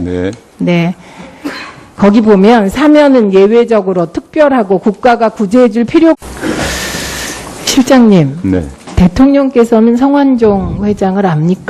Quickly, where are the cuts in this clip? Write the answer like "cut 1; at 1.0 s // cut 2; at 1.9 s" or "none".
none